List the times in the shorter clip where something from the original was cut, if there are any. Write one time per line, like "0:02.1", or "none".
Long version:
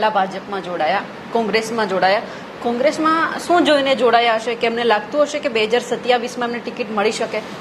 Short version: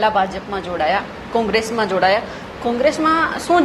none